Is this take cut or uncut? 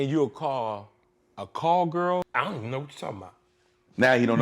cut